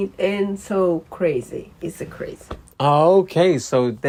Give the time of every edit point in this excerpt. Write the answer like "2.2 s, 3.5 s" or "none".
none